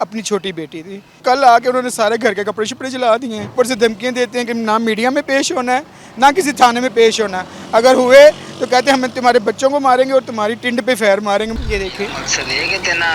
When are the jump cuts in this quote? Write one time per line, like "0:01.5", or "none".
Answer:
0:01.2
0:03.5
0:11.6